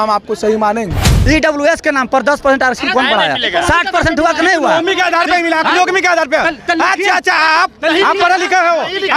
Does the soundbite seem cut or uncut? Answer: cut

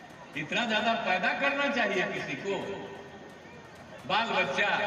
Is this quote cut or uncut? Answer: uncut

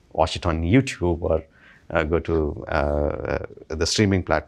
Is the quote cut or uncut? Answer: uncut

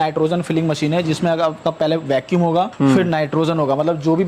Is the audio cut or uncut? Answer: cut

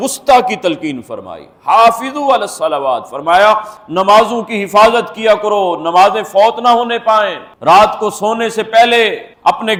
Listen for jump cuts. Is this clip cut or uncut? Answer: uncut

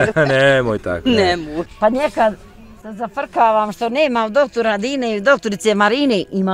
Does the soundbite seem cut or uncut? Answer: cut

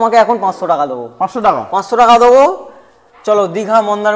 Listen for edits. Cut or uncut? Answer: uncut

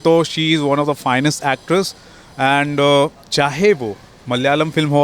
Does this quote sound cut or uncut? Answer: uncut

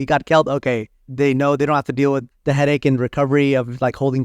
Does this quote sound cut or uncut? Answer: cut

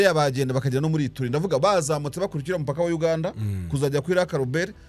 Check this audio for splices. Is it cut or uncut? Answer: uncut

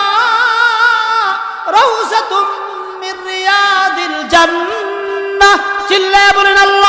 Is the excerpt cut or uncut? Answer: uncut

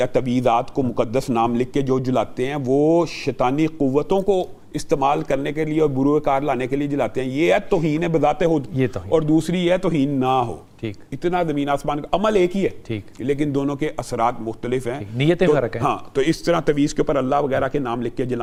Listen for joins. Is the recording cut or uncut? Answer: uncut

